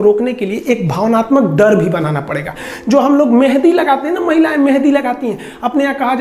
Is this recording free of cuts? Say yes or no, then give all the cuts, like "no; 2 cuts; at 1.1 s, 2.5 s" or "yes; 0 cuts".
no; 1 cut; at 2.7 s